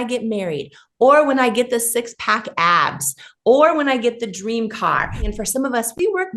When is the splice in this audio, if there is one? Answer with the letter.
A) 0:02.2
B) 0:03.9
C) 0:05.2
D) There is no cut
C